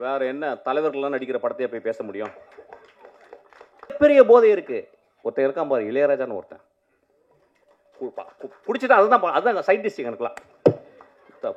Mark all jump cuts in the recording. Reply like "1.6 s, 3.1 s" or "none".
4.0 s